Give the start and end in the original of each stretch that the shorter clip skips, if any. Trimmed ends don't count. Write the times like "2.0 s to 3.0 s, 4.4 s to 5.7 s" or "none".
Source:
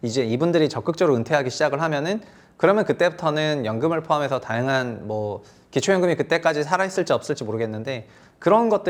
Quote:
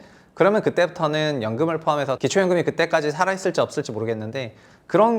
4.4 s to 5.7 s